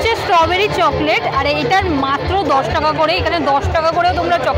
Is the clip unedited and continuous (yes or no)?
yes